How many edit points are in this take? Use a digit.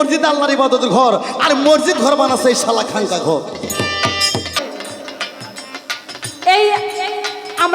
1